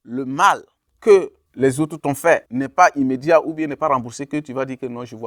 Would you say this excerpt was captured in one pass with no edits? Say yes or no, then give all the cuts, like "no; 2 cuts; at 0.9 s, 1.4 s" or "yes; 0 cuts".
yes; 0 cuts